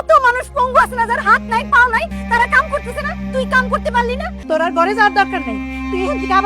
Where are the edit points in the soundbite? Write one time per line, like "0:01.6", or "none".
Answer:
0:02.2
0:04.3